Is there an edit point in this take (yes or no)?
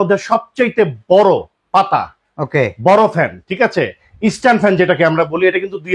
no